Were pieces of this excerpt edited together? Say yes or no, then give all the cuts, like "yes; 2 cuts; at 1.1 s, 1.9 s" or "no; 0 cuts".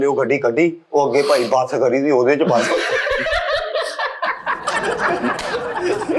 no; 0 cuts